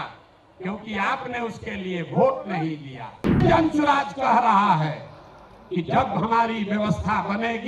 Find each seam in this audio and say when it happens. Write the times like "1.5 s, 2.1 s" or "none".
3.4 s

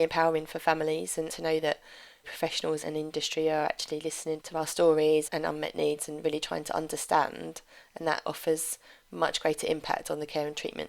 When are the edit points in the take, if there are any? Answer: 1.3 s, 2.8 s, 5.3 s, 8.3 s

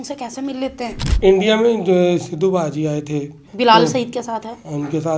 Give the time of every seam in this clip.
1.1 s, 3.4 s

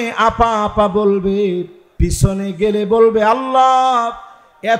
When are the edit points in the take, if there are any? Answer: 1.8 s

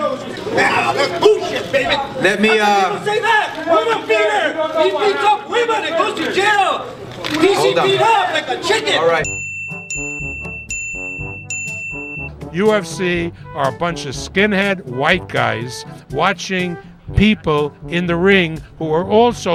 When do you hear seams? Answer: none

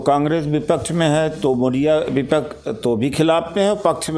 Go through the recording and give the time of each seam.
none

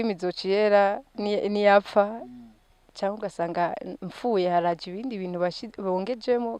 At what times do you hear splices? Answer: none

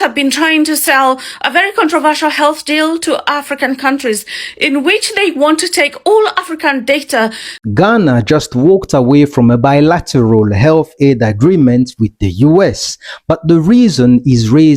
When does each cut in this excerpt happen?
7.6 s

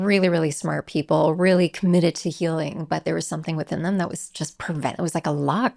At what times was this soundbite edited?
none

